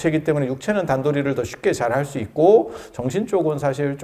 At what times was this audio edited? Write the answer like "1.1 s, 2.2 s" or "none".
none